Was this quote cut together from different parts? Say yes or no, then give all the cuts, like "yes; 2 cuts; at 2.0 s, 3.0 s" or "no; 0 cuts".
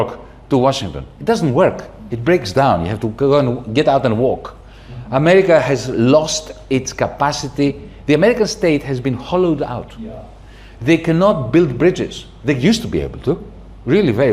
no; 0 cuts